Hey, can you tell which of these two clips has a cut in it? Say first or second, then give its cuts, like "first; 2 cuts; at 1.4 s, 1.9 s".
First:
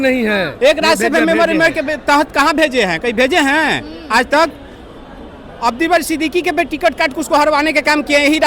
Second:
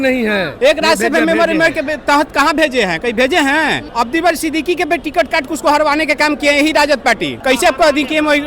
second; 2 cuts; at 3.8 s, 7.3 s